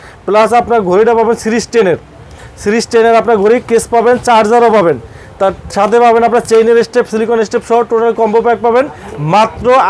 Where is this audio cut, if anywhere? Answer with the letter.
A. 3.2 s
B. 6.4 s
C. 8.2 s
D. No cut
D